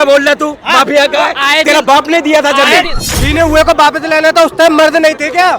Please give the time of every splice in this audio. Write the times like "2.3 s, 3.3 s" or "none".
3.0 s